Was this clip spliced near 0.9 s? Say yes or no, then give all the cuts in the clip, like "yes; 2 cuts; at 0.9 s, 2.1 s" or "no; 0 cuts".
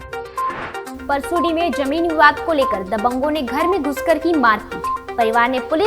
yes; 1 cut; at 0.9 s